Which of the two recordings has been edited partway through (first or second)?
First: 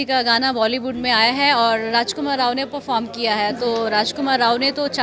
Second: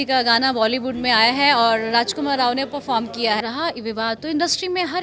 second